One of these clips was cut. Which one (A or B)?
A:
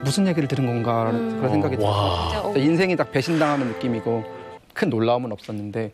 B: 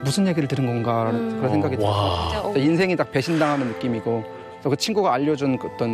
A